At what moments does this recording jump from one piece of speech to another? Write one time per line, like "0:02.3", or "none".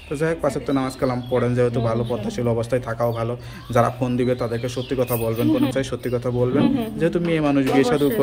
0:05.7